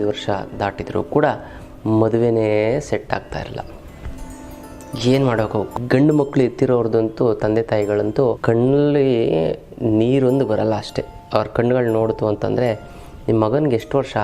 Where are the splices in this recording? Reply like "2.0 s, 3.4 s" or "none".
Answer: 5.8 s, 8.4 s